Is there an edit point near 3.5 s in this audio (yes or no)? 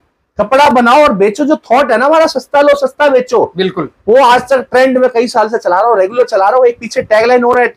no